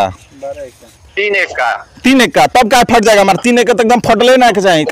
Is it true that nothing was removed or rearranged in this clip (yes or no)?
yes